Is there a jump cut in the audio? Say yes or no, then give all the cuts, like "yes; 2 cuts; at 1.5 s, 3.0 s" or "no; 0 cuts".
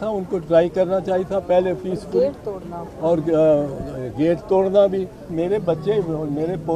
yes; 1 cut; at 5.3 s